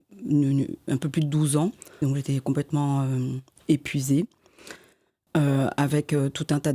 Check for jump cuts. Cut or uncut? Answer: cut